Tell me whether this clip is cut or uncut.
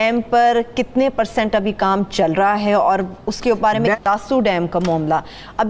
uncut